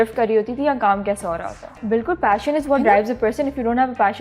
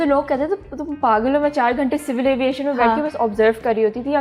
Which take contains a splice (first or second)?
first